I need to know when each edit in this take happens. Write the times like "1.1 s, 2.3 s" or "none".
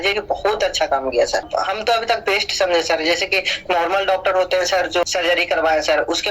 5.0 s